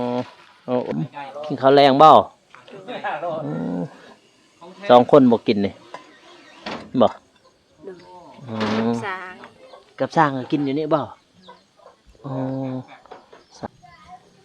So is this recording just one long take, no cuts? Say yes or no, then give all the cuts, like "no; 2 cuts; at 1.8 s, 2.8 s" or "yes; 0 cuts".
no; 2 cuts; at 0.9 s, 13.7 s